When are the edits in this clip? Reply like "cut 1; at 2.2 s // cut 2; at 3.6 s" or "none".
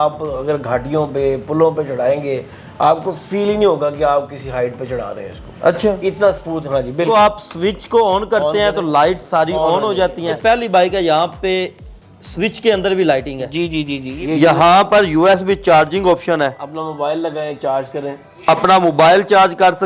cut 1; at 7.1 s // cut 2; at 10.3 s // cut 3; at 14.1 s